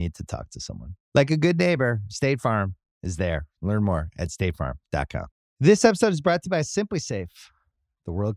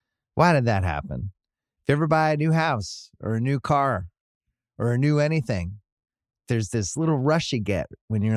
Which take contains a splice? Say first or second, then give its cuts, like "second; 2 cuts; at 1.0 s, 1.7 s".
first; 1 cut; at 5.4 s